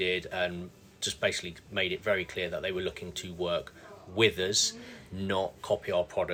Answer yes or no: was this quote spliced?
no